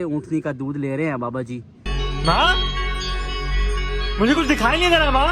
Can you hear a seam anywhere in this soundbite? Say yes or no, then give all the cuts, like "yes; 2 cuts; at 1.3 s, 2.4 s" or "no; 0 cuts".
no; 0 cuts